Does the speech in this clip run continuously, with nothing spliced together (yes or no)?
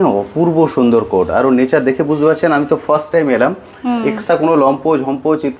yes